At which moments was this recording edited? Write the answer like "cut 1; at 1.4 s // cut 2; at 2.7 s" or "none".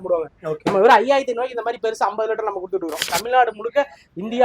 cut 1; at 3.0 s

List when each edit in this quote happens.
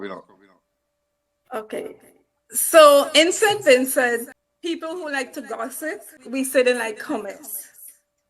cut 1; at 4.4 s // cut 2; at 6.1 s

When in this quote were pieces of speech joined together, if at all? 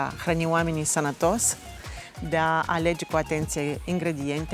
none

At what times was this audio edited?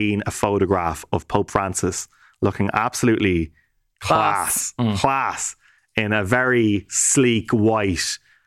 none

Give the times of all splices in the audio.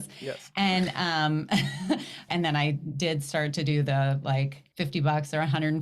cut 1; at 2.2 s // cut 2; at 4.6 s

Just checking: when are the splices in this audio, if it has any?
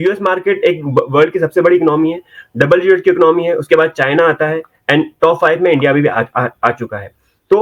none

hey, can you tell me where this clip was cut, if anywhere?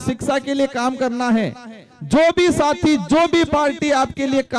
none

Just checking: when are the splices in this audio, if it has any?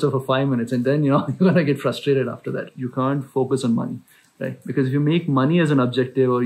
cut 1; at 2.7 s

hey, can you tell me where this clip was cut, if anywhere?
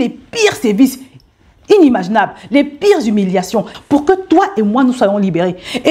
cut 1; at 3.7 s

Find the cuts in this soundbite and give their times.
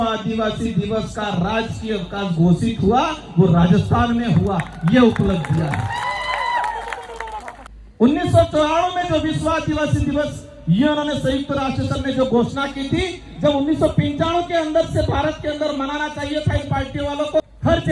none

